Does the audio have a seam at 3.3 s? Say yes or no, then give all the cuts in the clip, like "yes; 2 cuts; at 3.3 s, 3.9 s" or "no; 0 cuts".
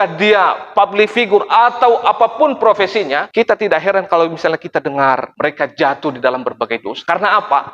yes; 1 cut; at 3.3 s